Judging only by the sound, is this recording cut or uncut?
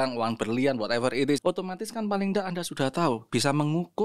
cut